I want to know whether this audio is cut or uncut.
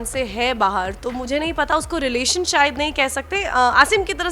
uncut